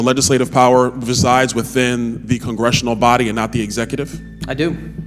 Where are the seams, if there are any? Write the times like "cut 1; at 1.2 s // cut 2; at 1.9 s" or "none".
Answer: none

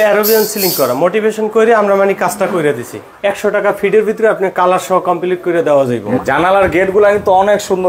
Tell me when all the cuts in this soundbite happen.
cut 1; at 3.0 s // cut 2; at 6.2 s

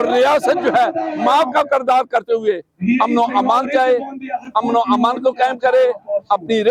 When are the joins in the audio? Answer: none

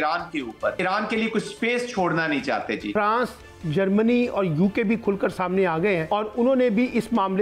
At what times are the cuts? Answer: cut 1; at 0.8 s // cut 2; at 2.9 s // cut 3; at 6.1 s

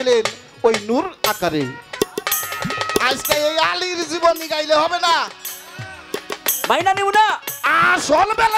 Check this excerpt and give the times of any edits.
none

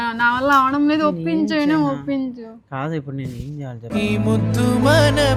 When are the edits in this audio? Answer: none

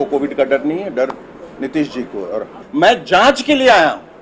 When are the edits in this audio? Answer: cut 1; at 2.6 s

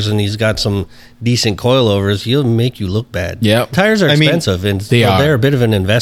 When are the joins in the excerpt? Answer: cut 1; at 3.7 s

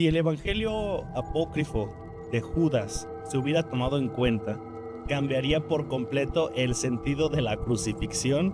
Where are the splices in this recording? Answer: none

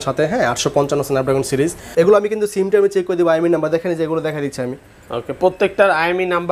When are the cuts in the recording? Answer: cut 1; at 1.8 s

